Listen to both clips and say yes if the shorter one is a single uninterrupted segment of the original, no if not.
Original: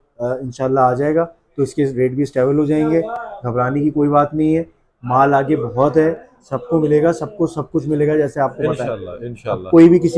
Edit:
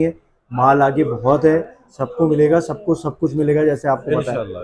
yes